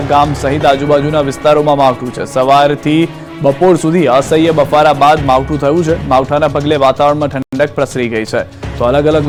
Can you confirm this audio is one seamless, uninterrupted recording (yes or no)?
yes